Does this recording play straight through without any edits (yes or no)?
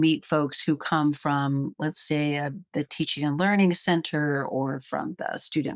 yes